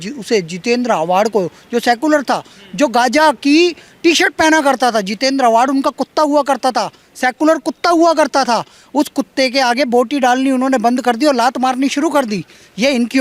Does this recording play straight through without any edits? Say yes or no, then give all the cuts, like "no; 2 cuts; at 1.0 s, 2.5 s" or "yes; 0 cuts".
yes; 0 cuts